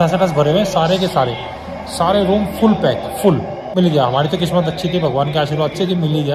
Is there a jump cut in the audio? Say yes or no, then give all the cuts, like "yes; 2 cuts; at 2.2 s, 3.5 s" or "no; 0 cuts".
yes; 1 cut; at 3.7 s